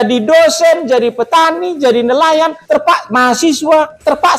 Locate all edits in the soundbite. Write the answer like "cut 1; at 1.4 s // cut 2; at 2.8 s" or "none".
cut 1; at 2.6 s